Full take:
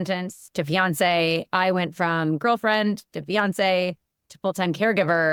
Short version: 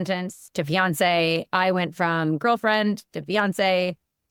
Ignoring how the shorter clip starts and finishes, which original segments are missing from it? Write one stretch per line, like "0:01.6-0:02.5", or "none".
none